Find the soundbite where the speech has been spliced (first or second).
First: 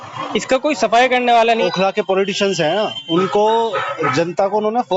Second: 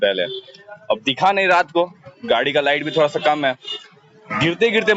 first